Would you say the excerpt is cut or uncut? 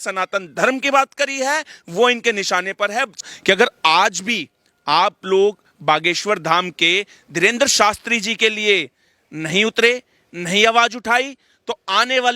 cut